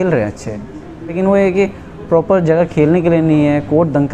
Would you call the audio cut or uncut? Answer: cut